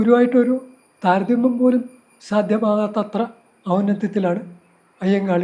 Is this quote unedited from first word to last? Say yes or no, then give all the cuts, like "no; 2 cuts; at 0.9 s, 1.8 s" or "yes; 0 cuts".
yes; 0 cuts